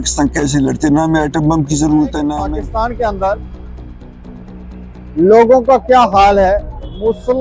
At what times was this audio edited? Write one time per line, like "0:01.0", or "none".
0:02.4